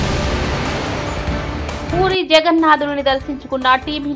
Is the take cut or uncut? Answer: cut